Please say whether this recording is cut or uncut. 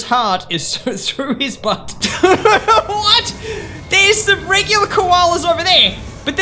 cut